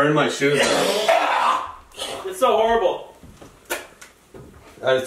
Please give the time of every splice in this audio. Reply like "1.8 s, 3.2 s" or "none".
none